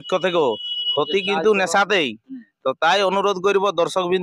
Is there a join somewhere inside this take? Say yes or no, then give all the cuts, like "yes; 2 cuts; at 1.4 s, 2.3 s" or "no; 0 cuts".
no; 0 cuts